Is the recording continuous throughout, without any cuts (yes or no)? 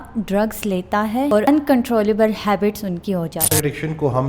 no